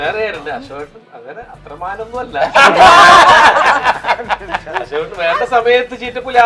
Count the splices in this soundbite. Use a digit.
0